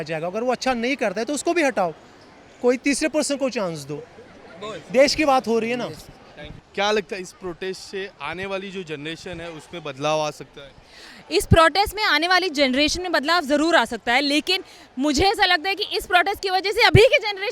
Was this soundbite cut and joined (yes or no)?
no